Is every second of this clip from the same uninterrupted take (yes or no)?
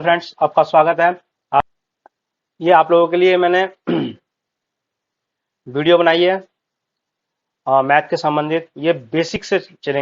no